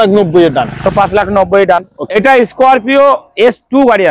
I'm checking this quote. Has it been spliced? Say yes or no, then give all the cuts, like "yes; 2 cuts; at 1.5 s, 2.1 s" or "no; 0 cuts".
yes; 1 cut; at 2.1 s